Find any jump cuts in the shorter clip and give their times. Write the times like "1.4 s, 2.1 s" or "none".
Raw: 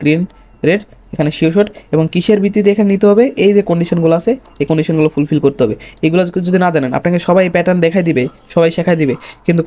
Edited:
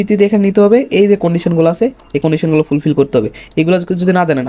none